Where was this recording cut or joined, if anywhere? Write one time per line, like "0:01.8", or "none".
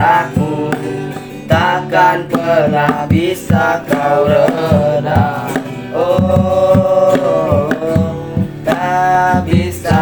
none